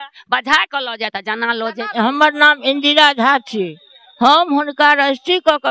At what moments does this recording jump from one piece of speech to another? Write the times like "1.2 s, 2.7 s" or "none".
1.9 s